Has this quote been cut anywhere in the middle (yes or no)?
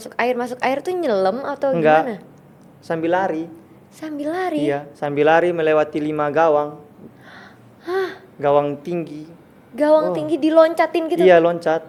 no